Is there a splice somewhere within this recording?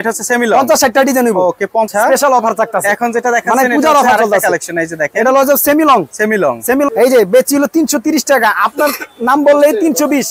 yes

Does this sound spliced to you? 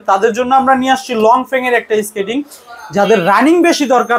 no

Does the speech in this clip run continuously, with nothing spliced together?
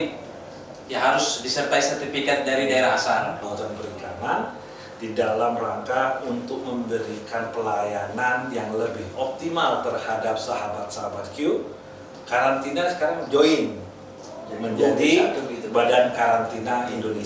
no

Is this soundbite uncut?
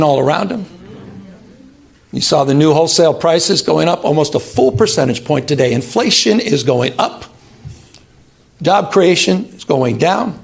yes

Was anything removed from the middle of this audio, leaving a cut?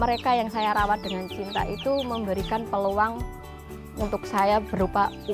no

